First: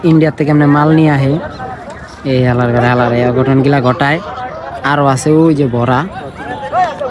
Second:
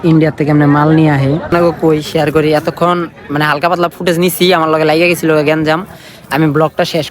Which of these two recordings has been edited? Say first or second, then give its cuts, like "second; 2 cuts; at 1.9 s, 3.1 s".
second; 1 cut; at 1.5 s